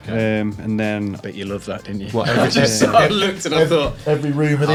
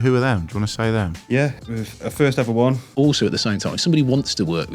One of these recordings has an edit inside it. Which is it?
second; 2 cuts; at 1.5 s, 2.9 s

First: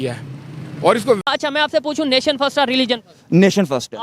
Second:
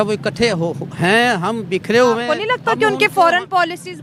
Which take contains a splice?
first; 1 cut; at 1.2 s

